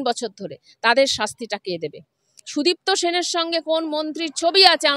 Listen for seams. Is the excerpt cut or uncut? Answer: uncut